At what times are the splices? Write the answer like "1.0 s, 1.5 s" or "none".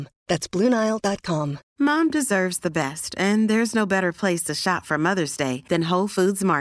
1.6 s